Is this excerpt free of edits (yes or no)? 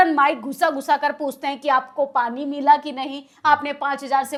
yes